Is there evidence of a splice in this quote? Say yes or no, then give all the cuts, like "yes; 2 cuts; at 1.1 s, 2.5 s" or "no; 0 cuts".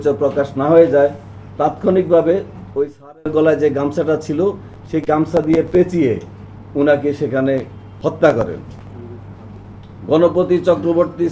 no; 0 cuts